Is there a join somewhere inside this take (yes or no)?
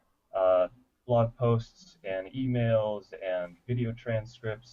yes